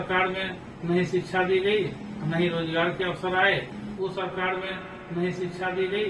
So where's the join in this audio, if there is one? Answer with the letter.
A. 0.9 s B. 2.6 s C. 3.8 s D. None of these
C